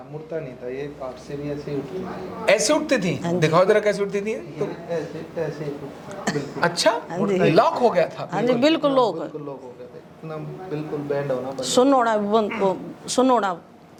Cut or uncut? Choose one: uncut